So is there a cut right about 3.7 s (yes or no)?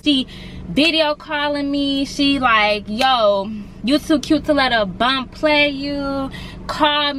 no